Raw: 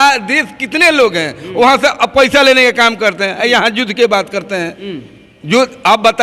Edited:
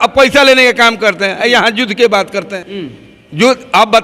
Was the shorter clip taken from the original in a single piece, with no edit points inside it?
no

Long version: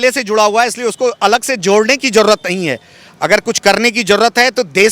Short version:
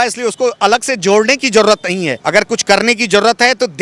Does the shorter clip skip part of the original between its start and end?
yes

